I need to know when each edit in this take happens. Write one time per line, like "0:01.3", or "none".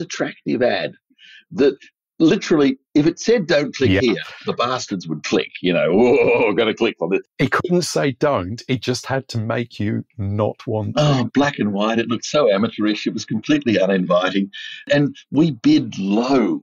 0:07.3

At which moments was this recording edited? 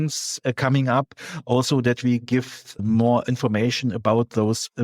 0:02.7

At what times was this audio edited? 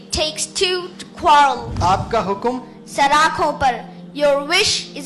0:01.6

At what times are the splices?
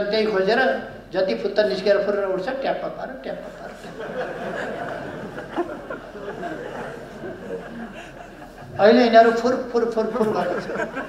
none

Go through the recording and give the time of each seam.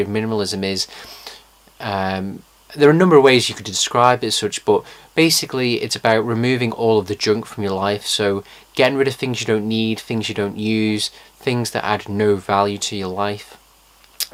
none

